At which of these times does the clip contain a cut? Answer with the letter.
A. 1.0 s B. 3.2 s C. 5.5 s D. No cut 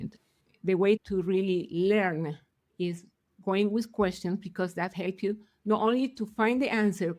A